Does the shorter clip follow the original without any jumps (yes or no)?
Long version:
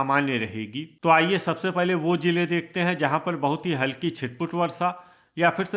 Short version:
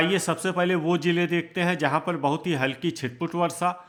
yes